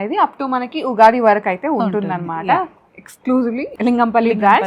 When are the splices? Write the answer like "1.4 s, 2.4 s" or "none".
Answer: 3.7 s